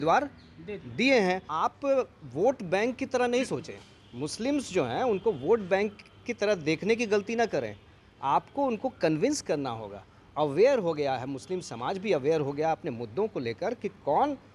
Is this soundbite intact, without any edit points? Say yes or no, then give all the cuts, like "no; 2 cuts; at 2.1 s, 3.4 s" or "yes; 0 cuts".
no; 1 cut; at 1.5 s